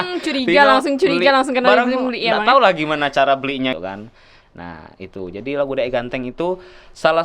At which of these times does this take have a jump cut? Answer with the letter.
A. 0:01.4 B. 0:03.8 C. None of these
B